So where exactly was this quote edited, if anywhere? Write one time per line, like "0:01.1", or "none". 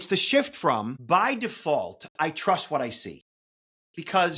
0:01.0